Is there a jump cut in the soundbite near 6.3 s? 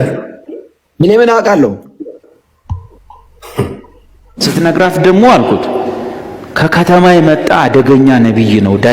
no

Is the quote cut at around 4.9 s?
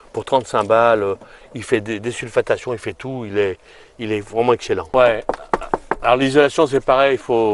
yes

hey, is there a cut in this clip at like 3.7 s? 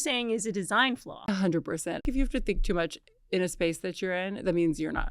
no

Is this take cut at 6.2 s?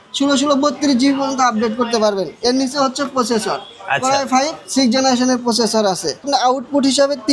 yes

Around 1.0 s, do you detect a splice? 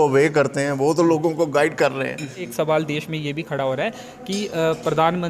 no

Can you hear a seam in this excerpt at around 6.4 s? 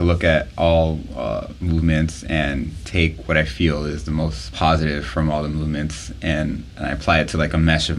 no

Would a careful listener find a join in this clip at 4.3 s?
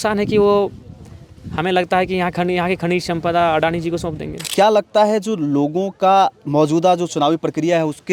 yes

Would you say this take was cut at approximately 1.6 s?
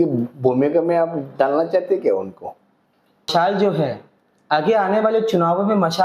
no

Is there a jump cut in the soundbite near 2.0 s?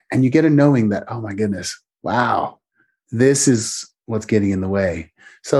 no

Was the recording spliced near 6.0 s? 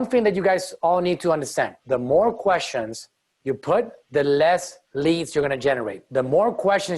yes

